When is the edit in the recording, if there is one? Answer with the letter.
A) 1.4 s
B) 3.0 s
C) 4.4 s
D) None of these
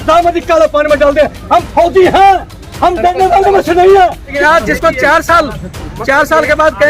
C